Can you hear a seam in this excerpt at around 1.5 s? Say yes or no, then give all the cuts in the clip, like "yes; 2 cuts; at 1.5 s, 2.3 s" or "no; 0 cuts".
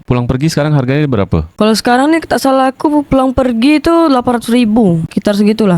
no; 0 cuts